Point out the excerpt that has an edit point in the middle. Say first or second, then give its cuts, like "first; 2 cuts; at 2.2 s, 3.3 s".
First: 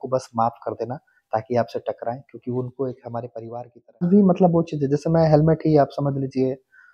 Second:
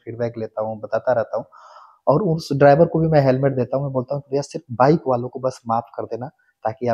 first; 1 cut; at 4.1 s